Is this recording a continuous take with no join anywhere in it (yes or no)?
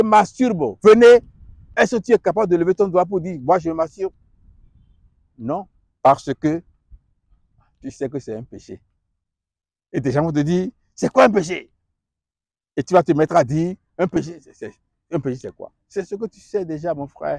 yes